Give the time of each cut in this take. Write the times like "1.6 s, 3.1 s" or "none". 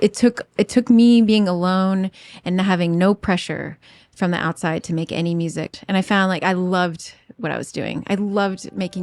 5.8 s